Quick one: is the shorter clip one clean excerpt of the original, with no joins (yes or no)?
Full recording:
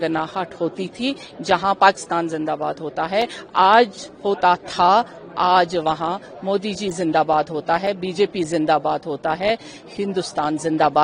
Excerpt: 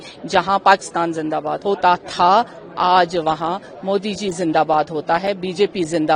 no